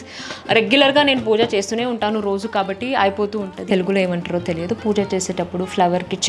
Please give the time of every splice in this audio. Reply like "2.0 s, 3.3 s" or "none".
3.7 s